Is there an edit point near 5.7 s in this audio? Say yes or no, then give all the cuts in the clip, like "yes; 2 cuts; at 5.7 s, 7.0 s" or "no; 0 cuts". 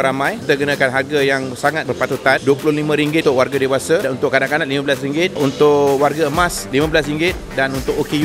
no; 0 cuts